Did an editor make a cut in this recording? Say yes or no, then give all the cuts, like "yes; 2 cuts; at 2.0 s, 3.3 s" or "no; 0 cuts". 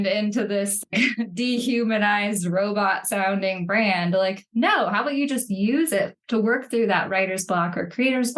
no; 0 cuts